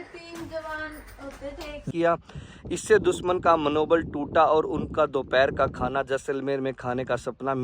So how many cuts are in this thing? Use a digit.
1